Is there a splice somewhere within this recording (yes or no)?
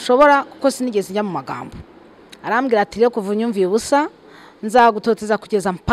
no